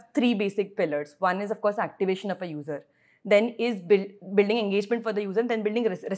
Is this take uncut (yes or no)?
yes